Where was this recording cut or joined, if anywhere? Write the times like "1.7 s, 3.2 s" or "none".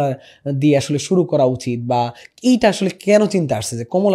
none